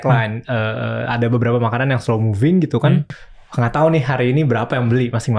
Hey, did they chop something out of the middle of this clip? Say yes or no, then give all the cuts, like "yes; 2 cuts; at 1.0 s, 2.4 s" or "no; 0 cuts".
yes; 1 cut; at 3.1 s